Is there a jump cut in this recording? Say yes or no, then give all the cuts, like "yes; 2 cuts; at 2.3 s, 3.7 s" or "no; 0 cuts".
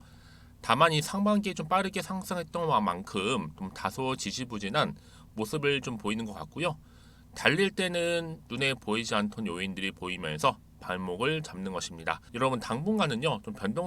yes; 1 cut; at 12.3 s